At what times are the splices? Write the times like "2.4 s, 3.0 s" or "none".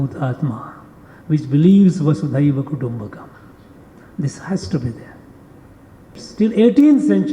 6.2 s